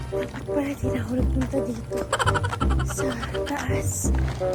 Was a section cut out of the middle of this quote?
no; 0 cuts

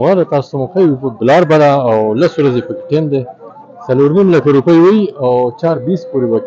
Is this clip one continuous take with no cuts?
yes; 0 cuts

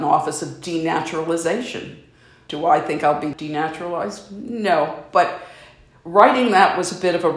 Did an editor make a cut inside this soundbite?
yes; 2 cuts; at 2.4 s, 3.3 s

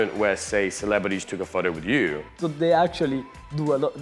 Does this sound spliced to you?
yes; 1 cut; at 2.3 s

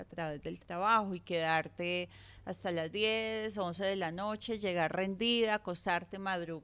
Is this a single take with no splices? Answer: yes; 0 cuts

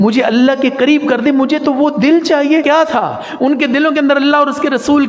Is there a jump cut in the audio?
yes; 1 cut; at 2.6 s

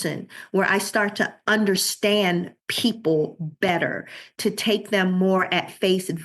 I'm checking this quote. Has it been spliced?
yes; 1 cut; at 1.4 s

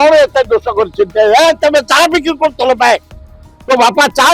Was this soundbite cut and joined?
no; 0 cuts

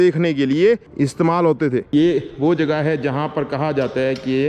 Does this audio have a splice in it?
yes; 1 cut; at 1.4 s

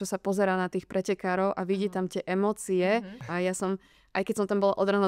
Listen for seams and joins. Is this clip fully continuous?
no; 1 cut; at 3.3 s

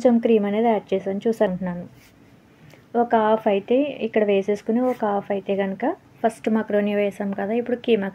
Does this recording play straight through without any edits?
no; 2 cuts; at 1.5 s, 6.1 s

